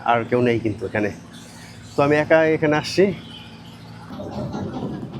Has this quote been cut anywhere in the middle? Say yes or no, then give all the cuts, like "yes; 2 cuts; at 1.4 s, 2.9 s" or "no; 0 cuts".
yes; 1 cut; at 4.0 s